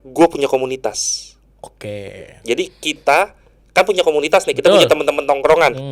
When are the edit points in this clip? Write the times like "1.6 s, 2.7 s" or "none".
none